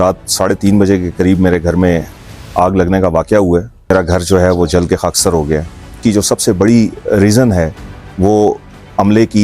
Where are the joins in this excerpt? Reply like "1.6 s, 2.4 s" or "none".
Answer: 3.9 s, 6.0 s